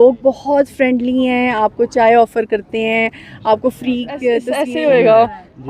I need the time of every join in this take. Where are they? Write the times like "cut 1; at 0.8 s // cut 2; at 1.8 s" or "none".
cut 1; at 4.5 s